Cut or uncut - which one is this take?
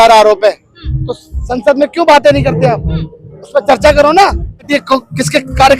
cut